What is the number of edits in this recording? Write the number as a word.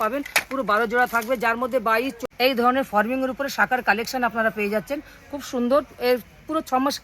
one